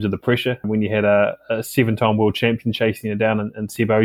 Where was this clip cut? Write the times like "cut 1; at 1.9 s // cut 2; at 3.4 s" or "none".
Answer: none